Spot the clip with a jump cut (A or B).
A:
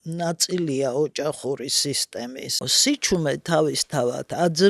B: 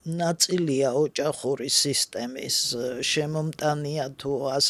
A